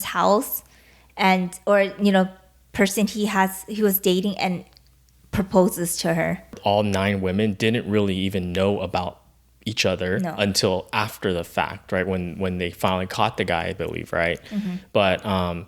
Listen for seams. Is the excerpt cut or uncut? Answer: cut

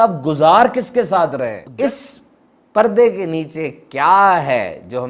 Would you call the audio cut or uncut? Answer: cut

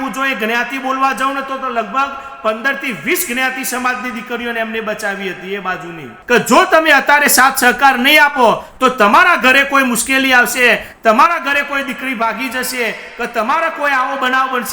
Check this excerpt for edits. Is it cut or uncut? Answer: cut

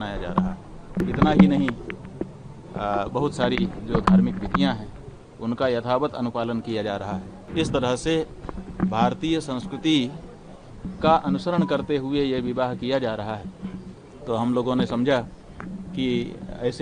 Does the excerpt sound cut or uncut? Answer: cut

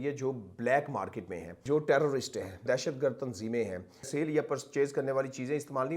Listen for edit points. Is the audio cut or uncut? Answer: cut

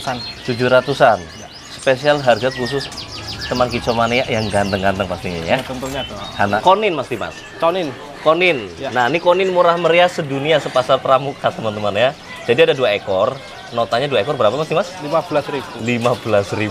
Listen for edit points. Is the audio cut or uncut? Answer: cut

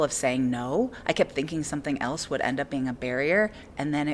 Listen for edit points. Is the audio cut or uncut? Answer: uncut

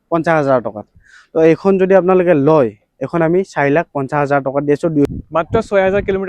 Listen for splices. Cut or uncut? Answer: cut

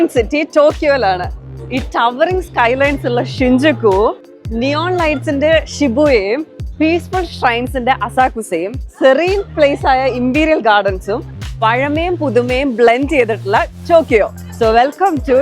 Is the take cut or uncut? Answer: cut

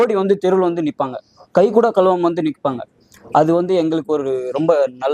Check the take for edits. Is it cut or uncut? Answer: uncut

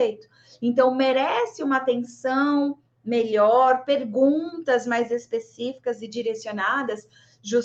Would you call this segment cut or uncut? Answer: uncut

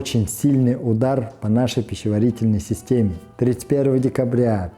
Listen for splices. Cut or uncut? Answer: cut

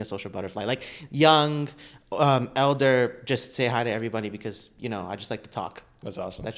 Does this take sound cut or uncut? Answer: uncut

